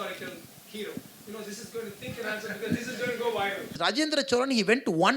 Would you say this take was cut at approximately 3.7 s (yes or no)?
yes